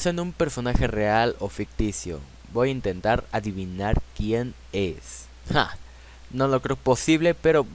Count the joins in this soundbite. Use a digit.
1